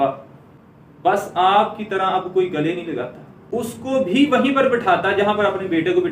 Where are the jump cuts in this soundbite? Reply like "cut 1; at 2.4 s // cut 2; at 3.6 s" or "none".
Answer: cut 1; at 3.4 s